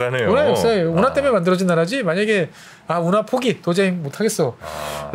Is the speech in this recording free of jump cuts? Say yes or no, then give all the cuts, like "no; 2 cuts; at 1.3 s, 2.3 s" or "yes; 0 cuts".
yes; 0 cuts